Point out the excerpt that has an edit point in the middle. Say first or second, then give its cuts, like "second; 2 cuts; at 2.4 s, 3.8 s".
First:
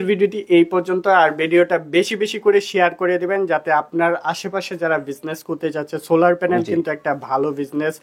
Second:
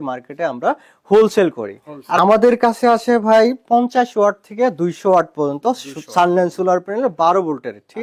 second; 1 cut; at 2.2 s